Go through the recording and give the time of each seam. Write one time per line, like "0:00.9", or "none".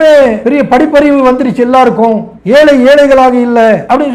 none